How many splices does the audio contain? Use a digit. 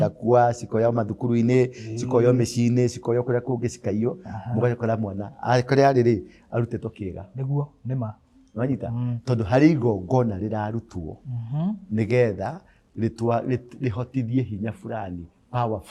0